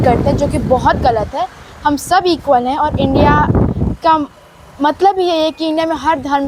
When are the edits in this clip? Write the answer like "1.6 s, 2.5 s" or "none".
none